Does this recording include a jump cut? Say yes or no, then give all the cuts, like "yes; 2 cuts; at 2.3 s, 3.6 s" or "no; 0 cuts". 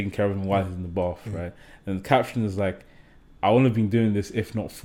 no; 0 cuts